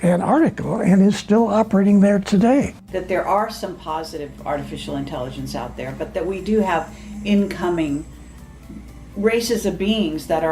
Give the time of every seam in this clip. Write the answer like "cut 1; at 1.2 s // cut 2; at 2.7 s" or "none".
cut 1; at 2.8 s